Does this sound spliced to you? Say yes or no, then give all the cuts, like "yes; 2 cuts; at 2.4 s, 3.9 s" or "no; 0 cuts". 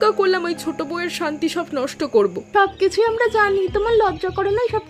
yes; 1 cut; at 2.4 s